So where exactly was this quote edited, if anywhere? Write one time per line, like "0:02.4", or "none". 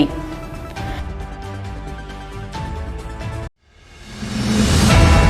none